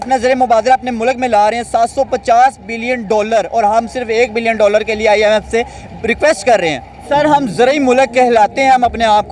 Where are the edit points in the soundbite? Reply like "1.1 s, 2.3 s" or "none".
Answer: 7.0 s